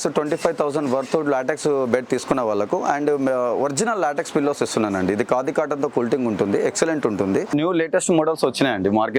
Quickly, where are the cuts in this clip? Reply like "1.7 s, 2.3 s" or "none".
7.5 s